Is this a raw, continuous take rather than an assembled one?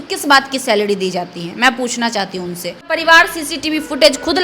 no; 1 cut; at 2.9 s

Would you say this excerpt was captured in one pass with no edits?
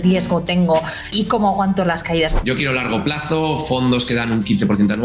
no; 2 cuts; at 1.1 s, 2.3 s

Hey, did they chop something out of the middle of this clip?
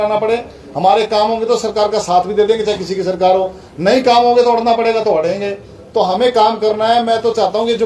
no; 0 cuts

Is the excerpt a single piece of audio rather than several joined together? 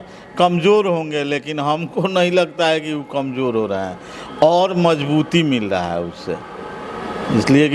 yes; 0 cuts

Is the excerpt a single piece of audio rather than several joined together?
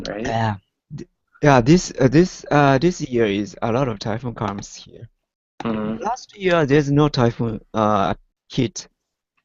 yes; 0 cuts

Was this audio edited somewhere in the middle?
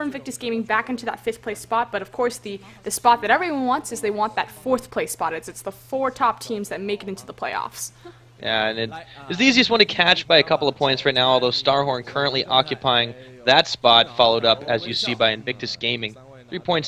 no; 0 cuts

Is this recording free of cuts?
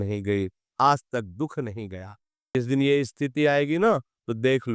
no; 1 cut; at 2.5 s

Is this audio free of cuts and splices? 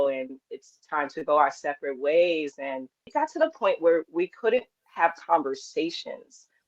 no; 2 cuts; at 3.0 s, 4.8 s

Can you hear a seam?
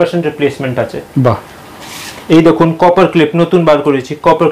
no; 0 cuts

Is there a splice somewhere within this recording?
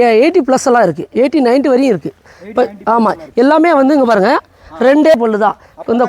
yes; 1 cut; at 5.1 s

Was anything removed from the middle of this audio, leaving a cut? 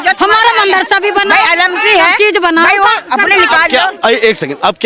no; 0 cuts

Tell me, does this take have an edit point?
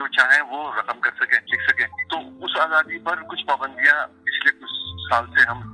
yes; 2 cuts; at 1.9 s, 3.3 s

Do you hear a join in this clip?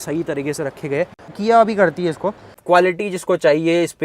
yes; 2 cuts; at 1.3 s, 2.5 s

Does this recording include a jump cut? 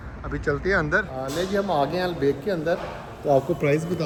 no; 0 cuts

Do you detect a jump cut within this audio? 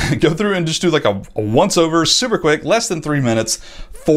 no; 0 cuts

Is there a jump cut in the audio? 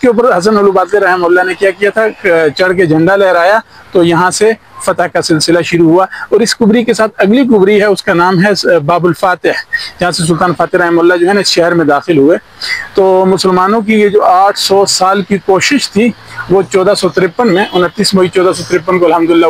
no; 0 cuts

